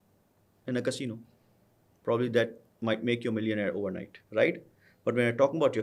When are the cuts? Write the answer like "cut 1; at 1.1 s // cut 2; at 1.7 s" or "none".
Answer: cut 1; at 4.1 s